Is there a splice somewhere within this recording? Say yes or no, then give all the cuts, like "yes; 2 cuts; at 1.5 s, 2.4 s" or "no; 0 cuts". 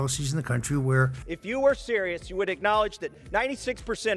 yes; 1 cut; at 1.2 s